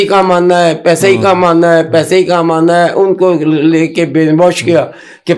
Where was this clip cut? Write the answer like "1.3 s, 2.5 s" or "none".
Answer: none